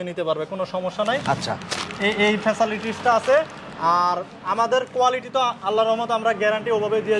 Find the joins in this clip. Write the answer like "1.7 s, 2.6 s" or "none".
none

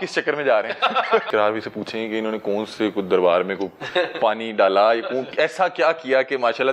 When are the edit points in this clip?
1.3 s

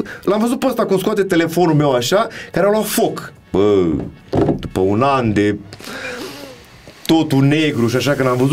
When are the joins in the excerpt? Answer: none

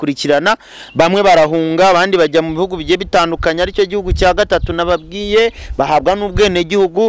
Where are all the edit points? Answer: none

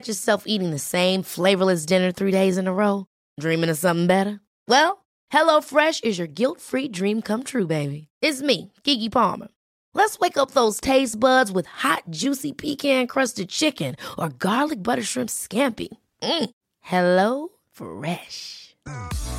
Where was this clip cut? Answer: none

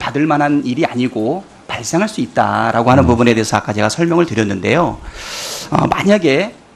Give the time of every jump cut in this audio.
5.6 s

